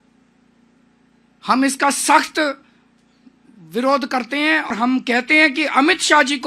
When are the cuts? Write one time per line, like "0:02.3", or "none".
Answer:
0:04.7